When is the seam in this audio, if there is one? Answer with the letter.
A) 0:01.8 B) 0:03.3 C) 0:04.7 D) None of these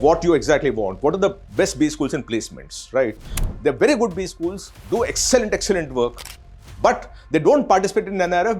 B